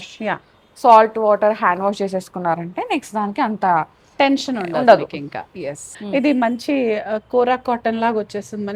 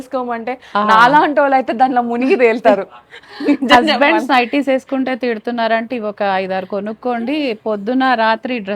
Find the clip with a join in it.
first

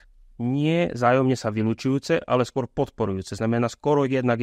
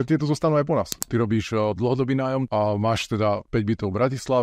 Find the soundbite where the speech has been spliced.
second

